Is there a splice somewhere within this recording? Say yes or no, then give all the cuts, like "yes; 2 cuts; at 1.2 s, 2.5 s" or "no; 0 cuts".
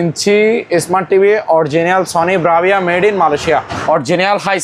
yes; 1 cut; at 3.7 s